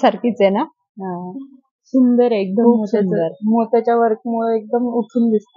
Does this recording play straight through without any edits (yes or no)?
yes